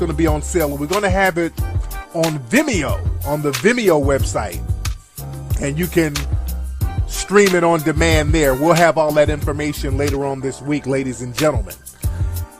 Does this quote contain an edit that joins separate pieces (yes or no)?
yes